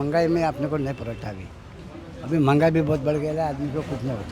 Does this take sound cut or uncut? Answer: uncut